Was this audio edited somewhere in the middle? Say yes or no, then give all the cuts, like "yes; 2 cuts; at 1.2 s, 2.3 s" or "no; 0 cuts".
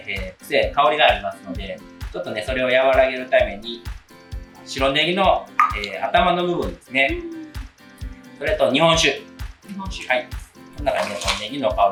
no; 0 cuts